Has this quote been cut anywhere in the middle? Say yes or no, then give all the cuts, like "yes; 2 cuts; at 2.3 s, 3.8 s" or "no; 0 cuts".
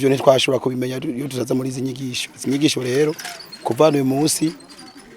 no; 0 cuts